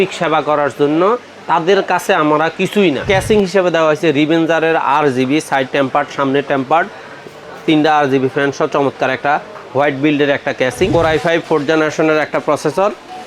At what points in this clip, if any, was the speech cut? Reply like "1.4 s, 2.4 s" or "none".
3.0 s, 10.9 s